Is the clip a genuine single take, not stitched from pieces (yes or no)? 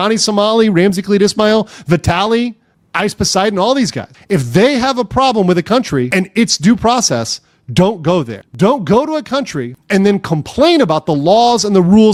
yes